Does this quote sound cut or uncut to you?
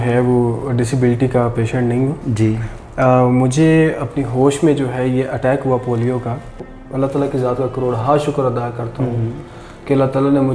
cut